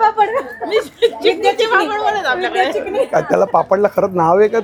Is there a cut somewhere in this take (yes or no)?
no